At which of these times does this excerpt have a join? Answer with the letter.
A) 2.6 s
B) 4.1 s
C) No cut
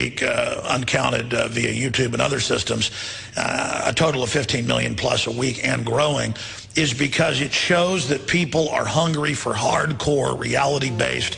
B